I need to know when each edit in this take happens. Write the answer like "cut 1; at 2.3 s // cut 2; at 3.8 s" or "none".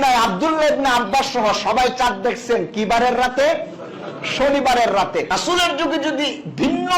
cut 1; at 5.3 s